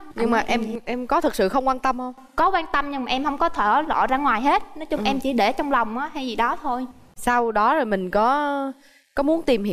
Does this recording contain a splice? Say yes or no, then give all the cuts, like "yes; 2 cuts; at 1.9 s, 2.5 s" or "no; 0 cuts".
no; 0 cuts